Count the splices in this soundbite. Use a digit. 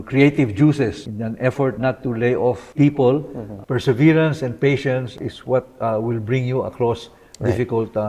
4